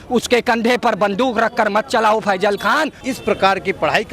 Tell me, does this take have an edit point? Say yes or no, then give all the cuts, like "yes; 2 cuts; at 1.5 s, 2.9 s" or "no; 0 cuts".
yes; 1 cut; at 3.0 s